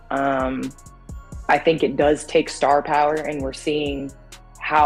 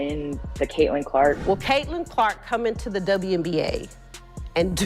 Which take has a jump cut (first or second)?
second